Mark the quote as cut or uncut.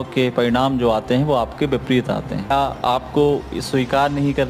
cut